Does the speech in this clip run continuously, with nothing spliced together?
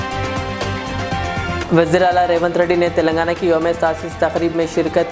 no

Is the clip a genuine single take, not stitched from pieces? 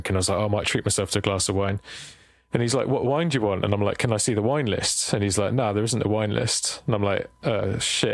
yes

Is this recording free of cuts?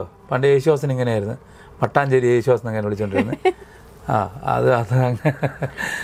yes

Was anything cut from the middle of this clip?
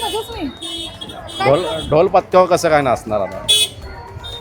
no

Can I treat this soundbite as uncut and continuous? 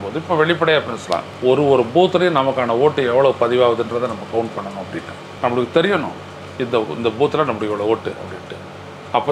yes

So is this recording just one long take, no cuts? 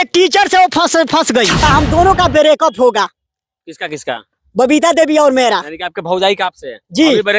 no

